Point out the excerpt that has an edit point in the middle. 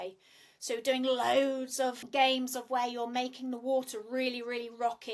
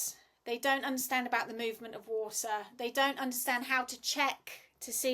first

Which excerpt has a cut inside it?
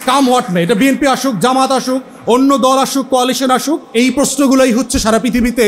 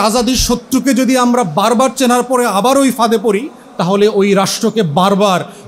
first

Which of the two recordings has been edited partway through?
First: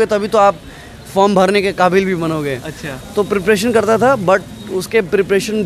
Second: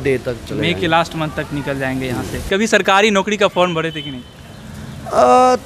second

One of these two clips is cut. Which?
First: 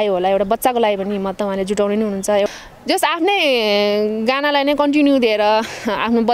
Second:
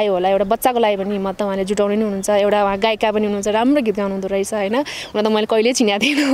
first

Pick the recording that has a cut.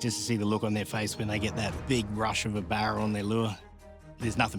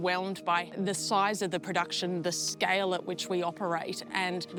first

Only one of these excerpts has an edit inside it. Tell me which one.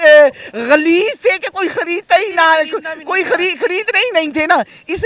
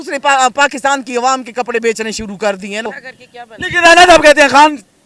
second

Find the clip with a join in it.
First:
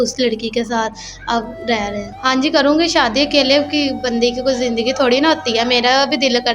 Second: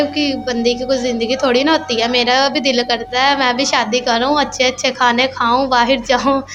first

